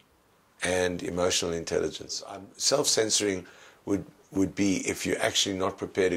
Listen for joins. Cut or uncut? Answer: cut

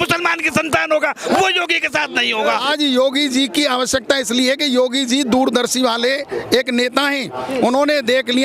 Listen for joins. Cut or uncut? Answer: cut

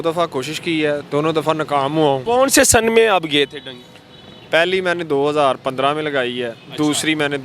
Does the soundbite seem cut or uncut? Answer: cut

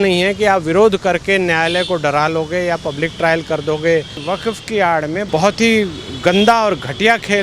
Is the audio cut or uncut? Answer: cut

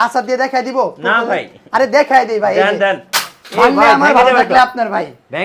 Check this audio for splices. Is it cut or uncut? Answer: uncut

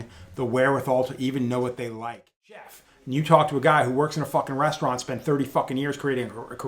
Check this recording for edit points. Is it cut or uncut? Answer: cut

